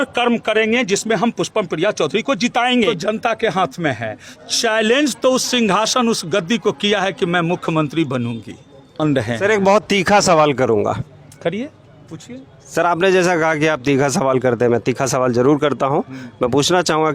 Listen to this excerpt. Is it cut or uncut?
cut